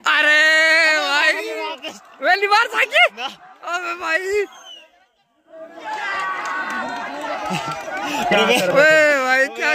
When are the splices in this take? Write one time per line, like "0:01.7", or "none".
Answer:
none